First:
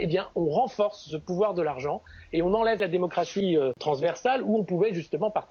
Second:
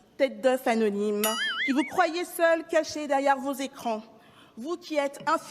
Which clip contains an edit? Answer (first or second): first